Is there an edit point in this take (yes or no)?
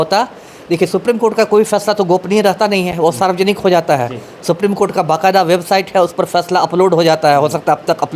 no